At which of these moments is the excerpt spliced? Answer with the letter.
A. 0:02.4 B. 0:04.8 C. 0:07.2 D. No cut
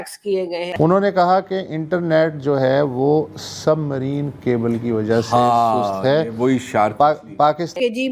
D